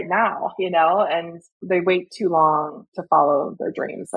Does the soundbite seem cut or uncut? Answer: cut